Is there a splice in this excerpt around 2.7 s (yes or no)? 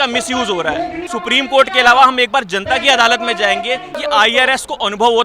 no